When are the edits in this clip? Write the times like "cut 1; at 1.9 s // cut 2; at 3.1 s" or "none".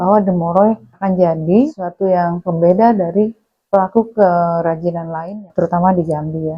cut 1; at 0.9 s // cut 2; at 1.9 s // cut 3; at 5.4 s